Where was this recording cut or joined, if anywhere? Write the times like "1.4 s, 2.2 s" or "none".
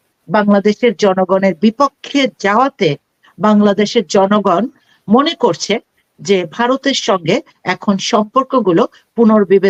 none